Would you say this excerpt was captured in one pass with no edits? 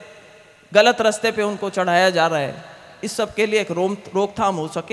yes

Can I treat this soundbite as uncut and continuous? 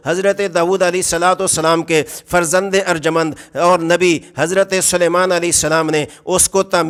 yes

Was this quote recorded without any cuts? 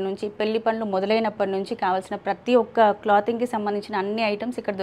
yes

